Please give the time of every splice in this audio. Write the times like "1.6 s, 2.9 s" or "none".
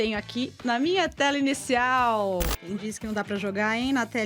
2.6 s